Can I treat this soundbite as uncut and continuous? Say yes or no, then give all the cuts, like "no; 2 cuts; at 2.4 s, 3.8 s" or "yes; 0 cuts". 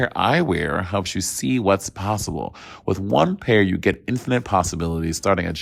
yes; 0 cuts